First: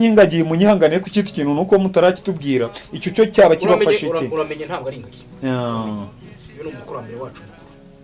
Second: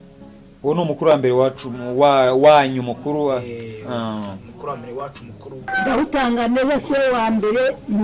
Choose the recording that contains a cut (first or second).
second